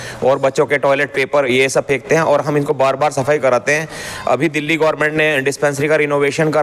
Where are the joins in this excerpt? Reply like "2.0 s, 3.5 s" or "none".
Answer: none